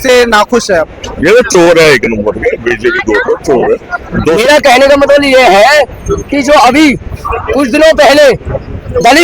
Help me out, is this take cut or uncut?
cut